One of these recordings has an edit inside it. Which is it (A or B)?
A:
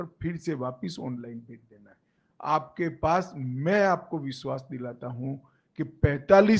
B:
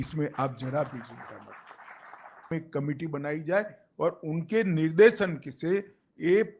B